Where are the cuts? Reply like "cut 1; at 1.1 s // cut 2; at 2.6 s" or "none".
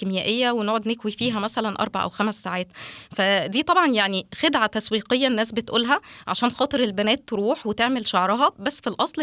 none